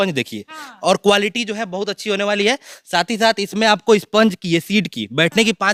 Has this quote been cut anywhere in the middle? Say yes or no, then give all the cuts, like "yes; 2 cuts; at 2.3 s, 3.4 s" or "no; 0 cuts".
no; 0 cuts